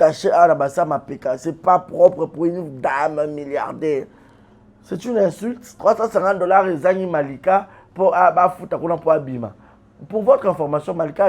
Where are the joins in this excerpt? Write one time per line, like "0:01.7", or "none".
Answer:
0:05.7

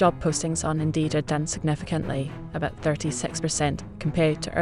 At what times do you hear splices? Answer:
none

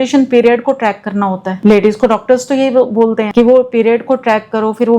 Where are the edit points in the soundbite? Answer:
0:01.5
0:03.2

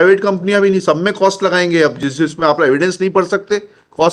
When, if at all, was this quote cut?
none

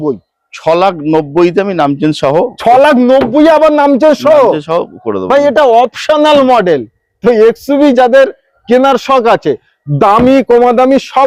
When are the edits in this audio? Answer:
none

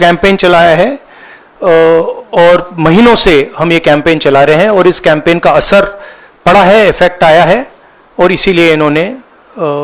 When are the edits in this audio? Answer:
none

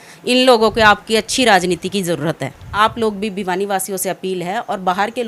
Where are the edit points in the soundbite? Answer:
0:02.6

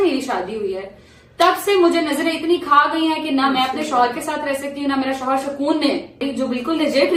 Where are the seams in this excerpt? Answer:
0:06.2

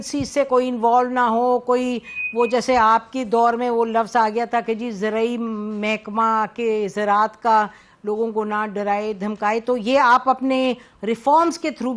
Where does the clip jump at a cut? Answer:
none

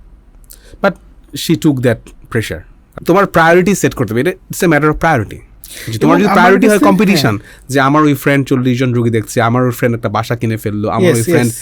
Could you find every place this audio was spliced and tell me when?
0:03.0

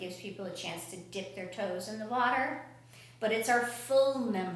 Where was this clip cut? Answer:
none

